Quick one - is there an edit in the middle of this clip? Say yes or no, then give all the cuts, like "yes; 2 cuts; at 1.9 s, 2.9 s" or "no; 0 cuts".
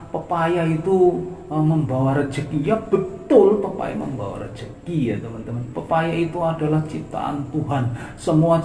no; 0 cuts